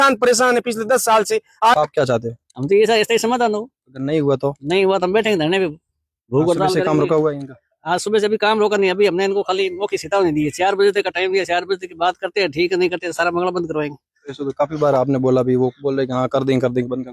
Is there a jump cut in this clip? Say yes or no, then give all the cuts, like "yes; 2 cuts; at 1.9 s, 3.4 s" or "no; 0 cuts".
yes; 1 cut; at 1.8 s